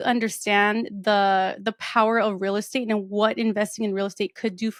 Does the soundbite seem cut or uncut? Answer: uncut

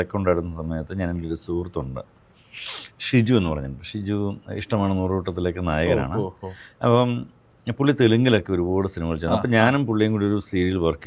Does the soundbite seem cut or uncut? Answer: uncut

